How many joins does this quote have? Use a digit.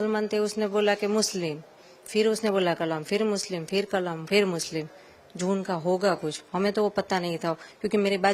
0